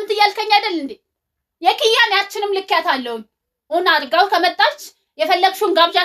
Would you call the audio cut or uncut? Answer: uncut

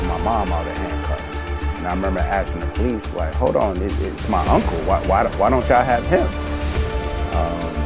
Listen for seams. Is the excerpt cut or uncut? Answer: uncut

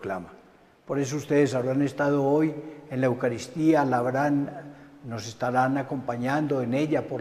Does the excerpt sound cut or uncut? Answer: cut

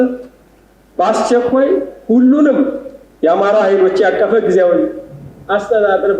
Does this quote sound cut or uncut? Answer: uncut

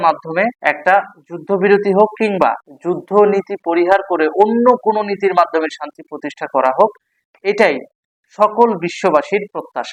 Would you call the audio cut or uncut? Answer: uncut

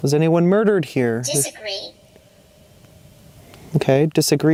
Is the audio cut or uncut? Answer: uncut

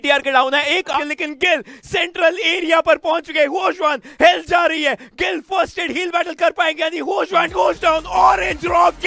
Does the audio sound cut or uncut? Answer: cut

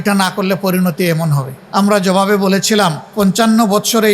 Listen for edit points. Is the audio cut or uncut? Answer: cut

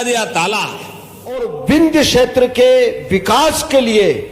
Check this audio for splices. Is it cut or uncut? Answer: cut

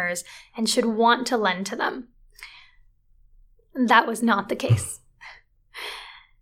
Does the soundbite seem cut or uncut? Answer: uncut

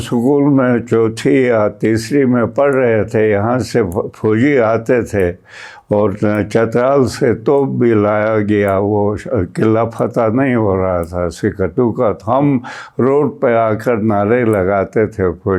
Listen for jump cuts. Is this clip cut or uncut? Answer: uncut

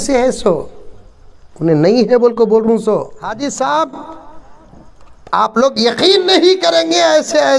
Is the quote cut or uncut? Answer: cut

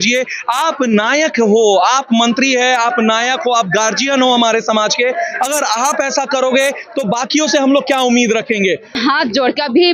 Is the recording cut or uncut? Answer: cut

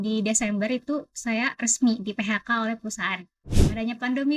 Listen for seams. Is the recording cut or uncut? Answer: cut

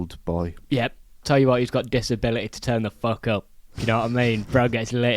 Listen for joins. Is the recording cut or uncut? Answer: cut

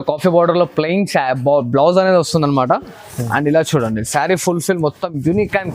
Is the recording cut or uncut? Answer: uncut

